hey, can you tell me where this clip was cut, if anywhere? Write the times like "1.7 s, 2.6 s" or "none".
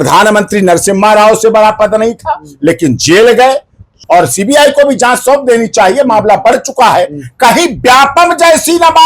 3.9 s